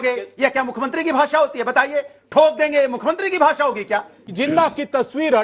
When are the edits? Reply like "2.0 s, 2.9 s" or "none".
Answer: 4.2 s